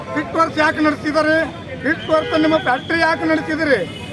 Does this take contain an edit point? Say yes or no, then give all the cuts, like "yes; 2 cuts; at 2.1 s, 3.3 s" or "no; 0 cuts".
yes; 1 cut; at 1.6 s